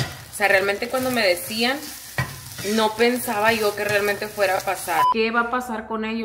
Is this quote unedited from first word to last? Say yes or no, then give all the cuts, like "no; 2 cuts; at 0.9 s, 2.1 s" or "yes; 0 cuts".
no; 1 cut; at 5.1 s